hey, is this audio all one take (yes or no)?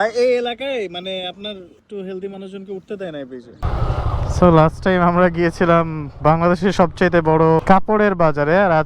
no